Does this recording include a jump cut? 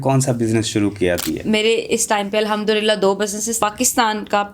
yes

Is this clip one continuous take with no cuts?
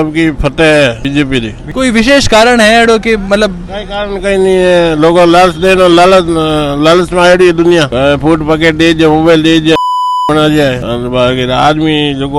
yes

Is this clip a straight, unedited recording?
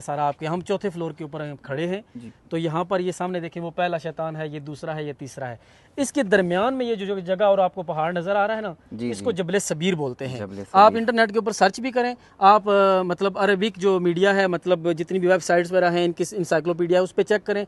yes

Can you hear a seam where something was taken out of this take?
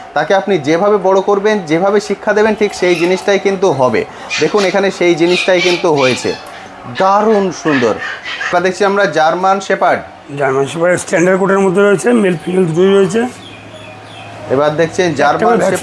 yes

